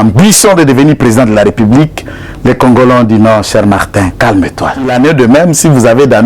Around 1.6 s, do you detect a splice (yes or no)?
no